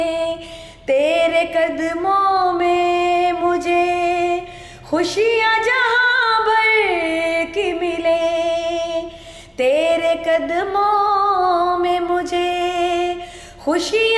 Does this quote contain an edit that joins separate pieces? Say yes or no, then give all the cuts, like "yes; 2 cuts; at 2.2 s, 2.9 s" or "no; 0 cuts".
no; 0 cuts